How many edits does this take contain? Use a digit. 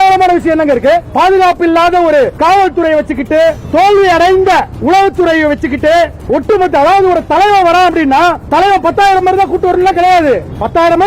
1